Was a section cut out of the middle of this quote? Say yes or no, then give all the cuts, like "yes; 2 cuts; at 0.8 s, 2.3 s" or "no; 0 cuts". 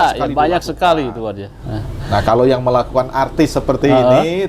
no; 0 cuts